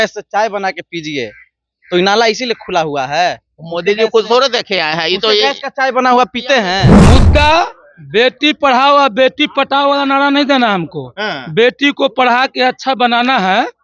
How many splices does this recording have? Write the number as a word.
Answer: one